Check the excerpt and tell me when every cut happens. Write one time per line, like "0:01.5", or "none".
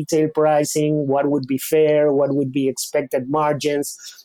none